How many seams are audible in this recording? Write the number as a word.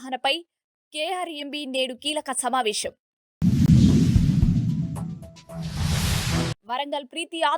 two